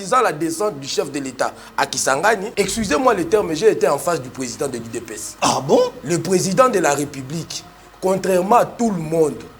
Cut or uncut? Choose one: cut